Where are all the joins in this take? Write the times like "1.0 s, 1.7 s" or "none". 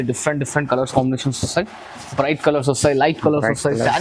none